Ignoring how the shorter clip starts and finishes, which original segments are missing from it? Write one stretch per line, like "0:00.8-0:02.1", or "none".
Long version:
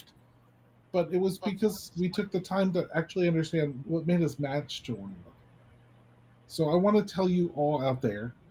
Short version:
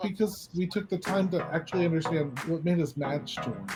none